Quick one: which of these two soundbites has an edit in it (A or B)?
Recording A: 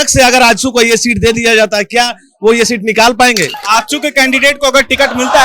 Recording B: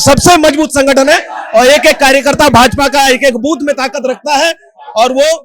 A